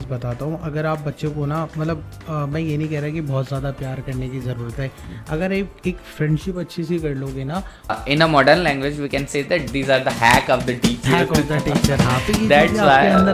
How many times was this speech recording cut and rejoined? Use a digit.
1